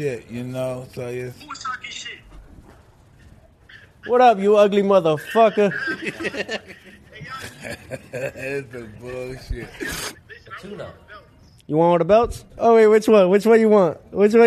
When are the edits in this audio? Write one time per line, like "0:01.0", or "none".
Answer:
0:02.3
0:10.2
0:12.5